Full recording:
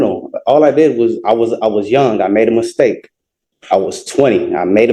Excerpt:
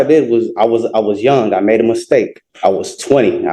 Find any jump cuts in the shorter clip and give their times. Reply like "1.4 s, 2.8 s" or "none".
2.4 s